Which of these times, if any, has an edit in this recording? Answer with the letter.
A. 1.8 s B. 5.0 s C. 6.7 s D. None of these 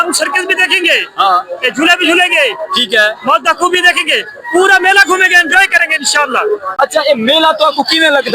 C